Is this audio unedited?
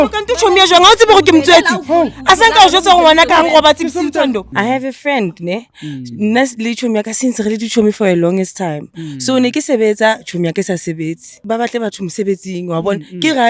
no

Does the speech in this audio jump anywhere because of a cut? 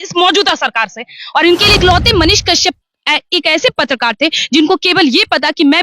yes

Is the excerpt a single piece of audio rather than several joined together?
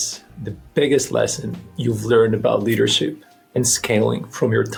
yes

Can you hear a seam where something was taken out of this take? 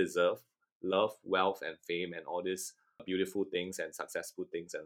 yes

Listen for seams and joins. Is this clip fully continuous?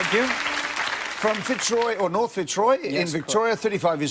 yes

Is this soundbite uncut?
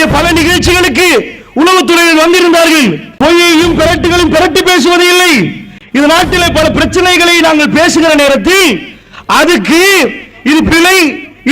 no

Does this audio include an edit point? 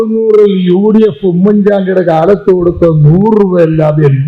no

